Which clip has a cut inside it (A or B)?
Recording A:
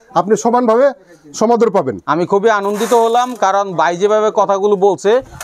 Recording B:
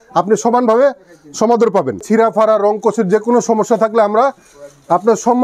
B